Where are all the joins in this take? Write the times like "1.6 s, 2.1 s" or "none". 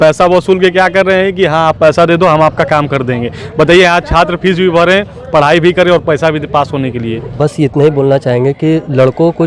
7.4 s